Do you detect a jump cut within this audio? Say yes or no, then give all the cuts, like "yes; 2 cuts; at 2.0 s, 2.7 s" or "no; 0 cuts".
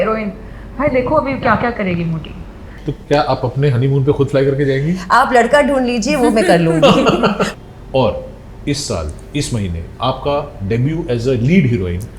yes; 2 cuts; at 2.9 s, 7.5 s